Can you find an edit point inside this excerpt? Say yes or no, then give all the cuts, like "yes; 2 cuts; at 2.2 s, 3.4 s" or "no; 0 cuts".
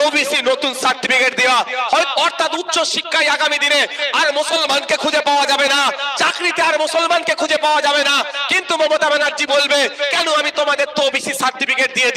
yes; 1 cut; at 2.1 s